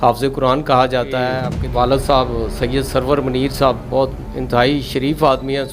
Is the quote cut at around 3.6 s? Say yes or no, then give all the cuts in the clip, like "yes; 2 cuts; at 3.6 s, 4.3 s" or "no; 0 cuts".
no; 1 cut; at 1.5 s